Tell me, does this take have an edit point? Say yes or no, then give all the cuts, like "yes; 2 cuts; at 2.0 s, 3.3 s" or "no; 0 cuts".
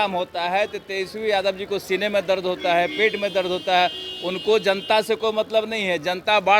no; 0 cuts